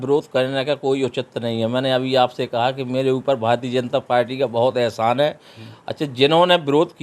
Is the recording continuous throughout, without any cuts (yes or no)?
yes